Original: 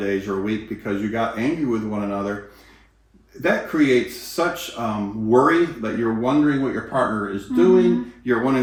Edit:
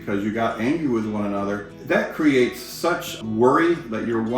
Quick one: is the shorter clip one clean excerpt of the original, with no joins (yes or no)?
no